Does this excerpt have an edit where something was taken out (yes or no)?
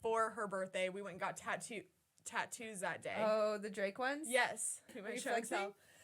yes